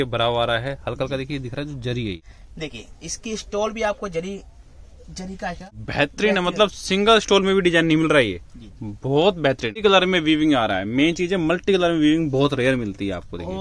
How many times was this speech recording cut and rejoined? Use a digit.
3